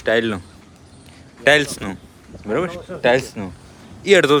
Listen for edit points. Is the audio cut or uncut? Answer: uncut